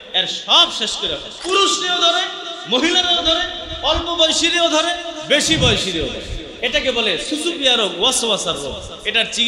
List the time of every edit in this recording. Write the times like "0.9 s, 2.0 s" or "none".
1.3 s

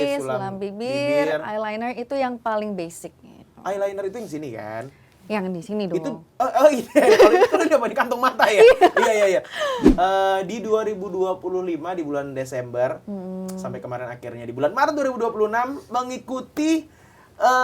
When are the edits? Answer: 9.8 s

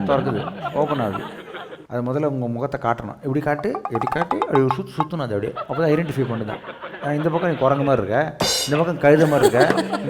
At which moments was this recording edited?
1.8 s

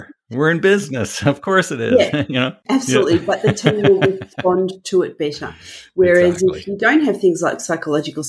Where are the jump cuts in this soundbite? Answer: none

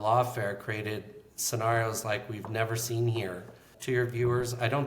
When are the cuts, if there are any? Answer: 3.7 s

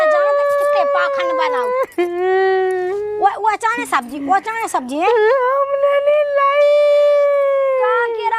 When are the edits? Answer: none

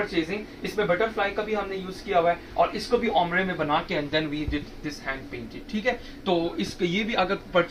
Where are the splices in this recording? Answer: none

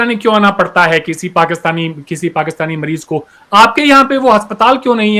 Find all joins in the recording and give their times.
none

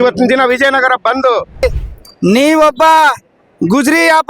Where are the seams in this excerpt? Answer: 1.6 s

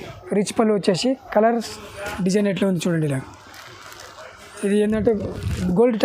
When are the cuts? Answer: 1.7 s

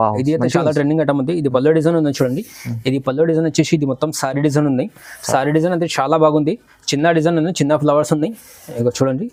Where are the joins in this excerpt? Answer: none

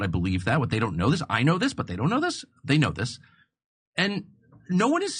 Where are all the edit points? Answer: 1.3 s

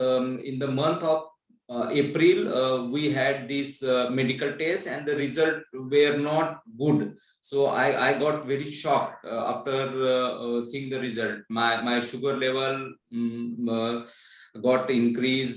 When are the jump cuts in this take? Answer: none

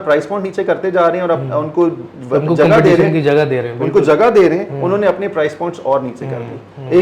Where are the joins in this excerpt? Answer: none

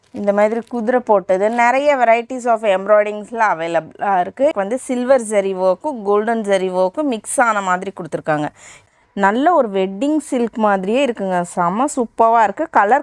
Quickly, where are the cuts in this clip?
4.5 s, 8.8 s

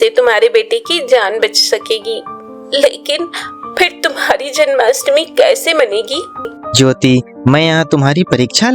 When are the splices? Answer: 6.6 s

